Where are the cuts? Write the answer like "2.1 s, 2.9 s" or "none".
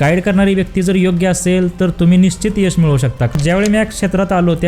3.3 s

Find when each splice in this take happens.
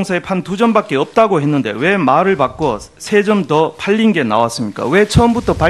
4.6 s

